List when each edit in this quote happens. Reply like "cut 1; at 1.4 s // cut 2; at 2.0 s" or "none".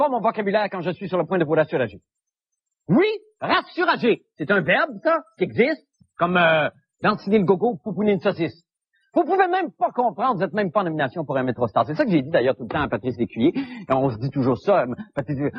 cut 1; at 5.4 s

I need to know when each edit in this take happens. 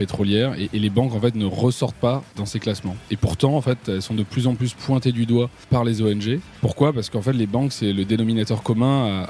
cut 1; at 2.4 s // cut 2; at 5.7 s // cut 3; at 6.5 s

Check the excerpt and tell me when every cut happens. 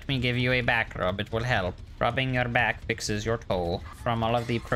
cut 1; at 1.8 s // cut 2; at 3.9 s

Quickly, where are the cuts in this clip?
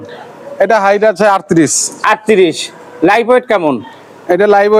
none

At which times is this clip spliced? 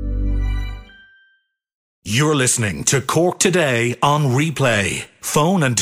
cut 1; at 2.0 s

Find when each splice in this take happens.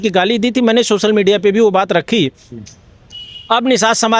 none

